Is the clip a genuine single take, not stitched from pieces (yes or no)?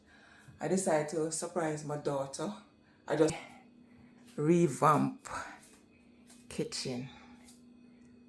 no